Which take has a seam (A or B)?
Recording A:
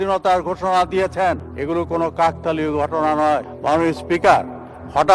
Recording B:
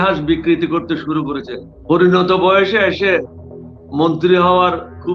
A